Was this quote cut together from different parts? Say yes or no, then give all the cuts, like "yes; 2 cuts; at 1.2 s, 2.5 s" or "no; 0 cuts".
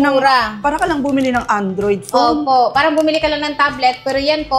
no; 0 cuts